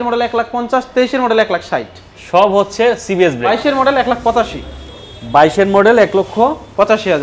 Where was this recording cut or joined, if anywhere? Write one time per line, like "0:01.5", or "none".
0:03.6